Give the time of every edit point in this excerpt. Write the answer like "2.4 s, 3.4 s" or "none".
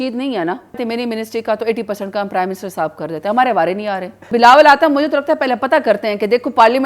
0.8 s, 4.3 s